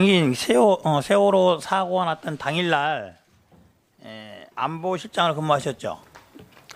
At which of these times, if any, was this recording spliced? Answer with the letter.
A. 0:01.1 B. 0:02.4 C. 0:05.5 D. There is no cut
D